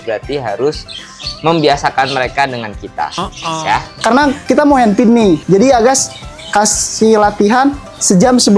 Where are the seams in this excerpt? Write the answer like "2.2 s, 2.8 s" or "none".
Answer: 3.9 s, 5.4 s